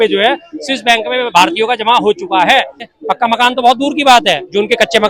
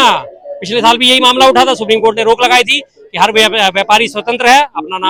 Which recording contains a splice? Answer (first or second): first